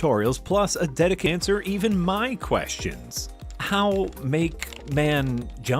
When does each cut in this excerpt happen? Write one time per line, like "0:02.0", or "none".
0:01.3